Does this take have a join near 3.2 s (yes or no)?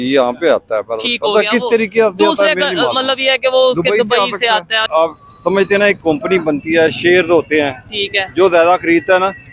no